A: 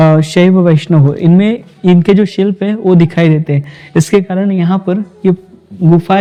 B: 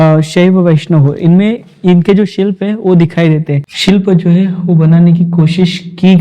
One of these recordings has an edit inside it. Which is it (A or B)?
B